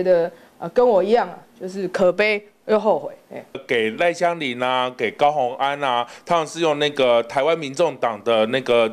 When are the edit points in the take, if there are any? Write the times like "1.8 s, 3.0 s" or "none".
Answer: 3.6 s